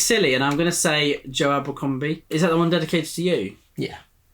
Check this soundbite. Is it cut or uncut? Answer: cut